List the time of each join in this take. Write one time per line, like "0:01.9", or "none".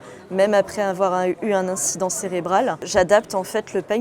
0:02.8